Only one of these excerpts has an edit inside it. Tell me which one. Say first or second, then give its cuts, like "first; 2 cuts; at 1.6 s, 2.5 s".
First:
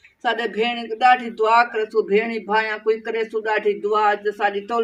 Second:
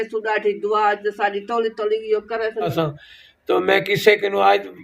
second; 1 cut; at 2.7 s